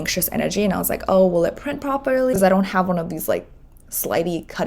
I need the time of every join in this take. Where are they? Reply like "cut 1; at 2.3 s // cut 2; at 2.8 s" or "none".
cut 1; at 2.3 s